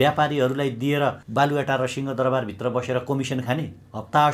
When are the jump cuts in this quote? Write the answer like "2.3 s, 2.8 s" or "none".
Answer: 1.2 s